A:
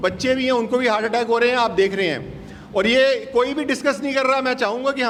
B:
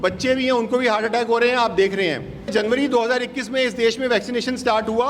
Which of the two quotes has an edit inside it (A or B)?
B